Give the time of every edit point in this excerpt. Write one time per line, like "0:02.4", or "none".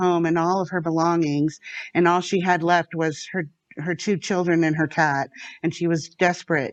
none